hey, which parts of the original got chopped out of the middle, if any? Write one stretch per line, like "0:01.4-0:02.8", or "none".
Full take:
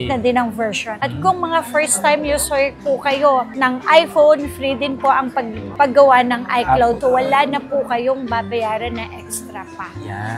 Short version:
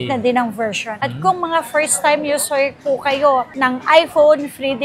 none